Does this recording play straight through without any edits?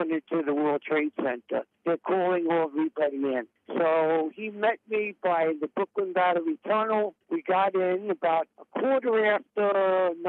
yes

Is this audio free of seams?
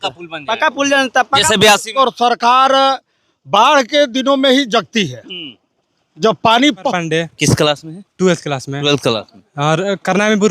no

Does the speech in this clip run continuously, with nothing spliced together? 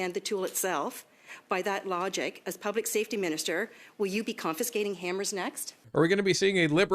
no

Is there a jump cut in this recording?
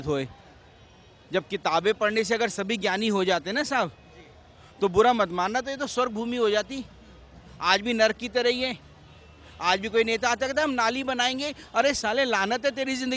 no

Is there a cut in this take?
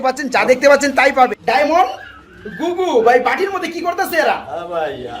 yes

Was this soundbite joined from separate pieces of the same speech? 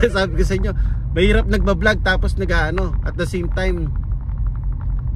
no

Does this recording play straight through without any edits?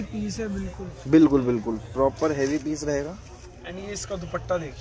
yes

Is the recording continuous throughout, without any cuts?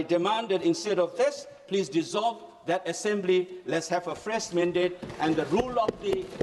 yes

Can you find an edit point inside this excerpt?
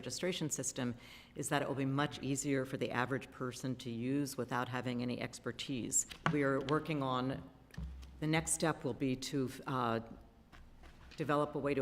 yes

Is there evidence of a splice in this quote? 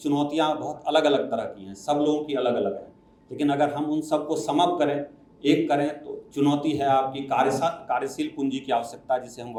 no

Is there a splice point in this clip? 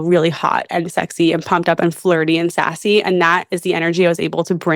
no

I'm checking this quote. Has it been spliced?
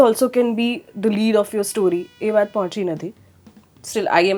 no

